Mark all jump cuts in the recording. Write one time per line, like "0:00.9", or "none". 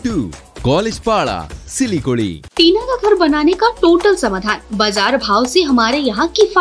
0:02.4